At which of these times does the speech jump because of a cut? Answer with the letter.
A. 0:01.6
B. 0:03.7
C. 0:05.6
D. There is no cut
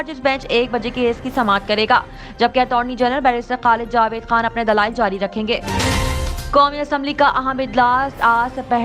C